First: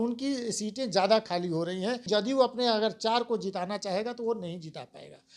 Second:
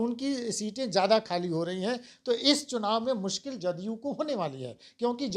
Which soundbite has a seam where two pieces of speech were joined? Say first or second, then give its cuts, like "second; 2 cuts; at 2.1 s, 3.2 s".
first; 1 cut; at 2.0 s